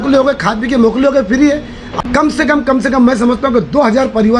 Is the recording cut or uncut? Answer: cut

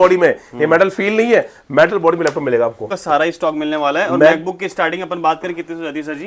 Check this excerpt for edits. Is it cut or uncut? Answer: cut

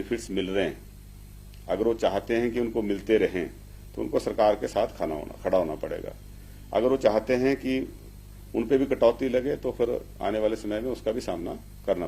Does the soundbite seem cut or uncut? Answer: uncut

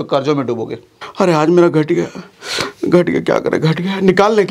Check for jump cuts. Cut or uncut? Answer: cut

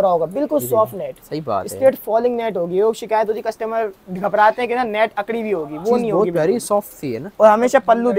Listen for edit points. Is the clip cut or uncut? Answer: uncut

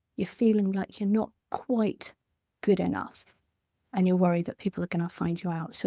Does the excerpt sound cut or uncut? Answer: uncut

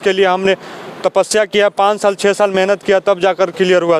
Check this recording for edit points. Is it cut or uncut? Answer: uncut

